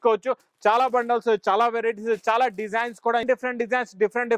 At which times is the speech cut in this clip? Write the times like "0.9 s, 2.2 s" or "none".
3.2 s